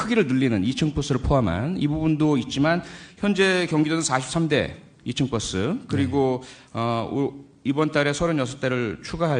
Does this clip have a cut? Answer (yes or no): no